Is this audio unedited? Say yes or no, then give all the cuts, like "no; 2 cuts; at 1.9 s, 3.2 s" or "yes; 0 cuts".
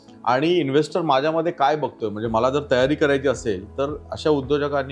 yes; 0 cuts